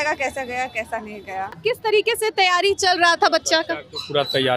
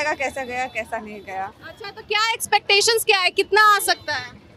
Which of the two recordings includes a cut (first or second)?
first